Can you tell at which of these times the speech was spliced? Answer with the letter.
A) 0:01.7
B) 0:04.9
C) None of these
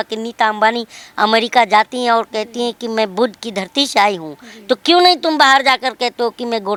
C